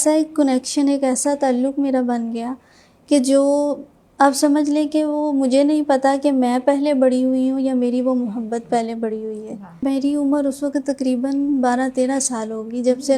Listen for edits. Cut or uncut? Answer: cut